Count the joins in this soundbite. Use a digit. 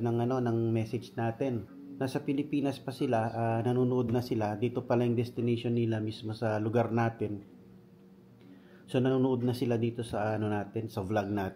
1